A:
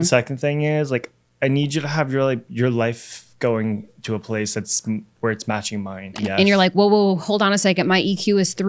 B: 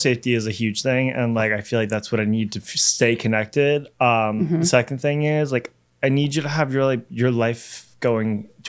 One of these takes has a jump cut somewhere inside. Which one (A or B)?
A